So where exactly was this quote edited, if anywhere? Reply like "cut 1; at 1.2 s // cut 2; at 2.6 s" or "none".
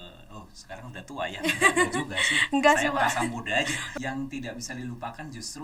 cut 1; at 3.8 s